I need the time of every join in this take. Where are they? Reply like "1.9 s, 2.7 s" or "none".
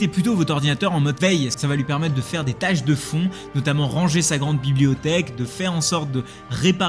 5.4 s